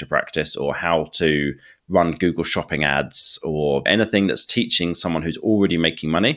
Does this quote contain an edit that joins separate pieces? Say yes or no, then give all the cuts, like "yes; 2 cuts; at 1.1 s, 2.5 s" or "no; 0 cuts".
yes; 1 cut; at 3.8 s